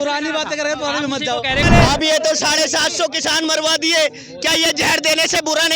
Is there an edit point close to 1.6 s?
yes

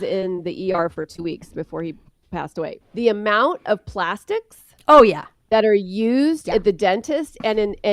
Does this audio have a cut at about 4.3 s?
no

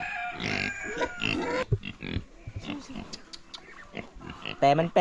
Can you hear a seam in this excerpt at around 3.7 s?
no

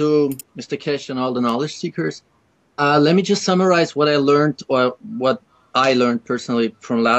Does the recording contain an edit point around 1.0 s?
yes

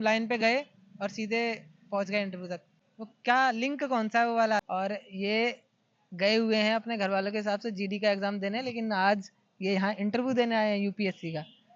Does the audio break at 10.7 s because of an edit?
no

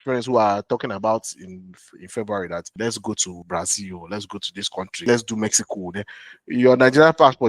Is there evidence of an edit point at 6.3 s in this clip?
no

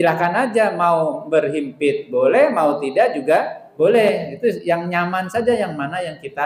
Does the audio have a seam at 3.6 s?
yes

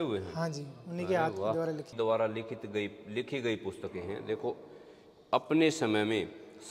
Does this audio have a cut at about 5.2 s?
no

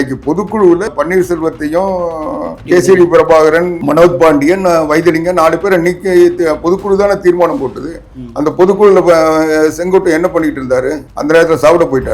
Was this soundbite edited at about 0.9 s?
yes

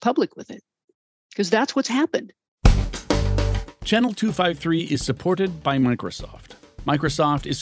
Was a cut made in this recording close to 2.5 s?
yes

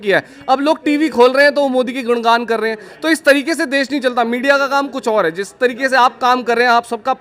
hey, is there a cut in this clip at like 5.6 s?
no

